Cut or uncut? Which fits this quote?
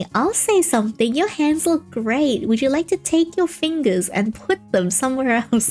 uncut